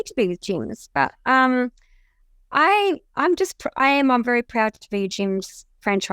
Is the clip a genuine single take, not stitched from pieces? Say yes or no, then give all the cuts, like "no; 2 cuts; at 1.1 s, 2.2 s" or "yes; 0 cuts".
yes; 0 cuts